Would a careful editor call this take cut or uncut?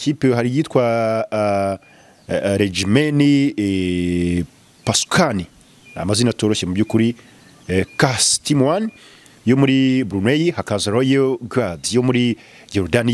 uncut